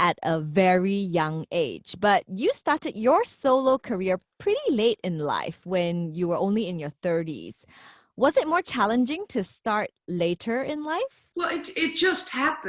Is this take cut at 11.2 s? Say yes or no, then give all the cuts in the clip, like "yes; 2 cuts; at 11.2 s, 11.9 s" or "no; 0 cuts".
yes; 1 cut; at 11.2 s